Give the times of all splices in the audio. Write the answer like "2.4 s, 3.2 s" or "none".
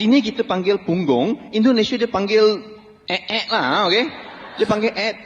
none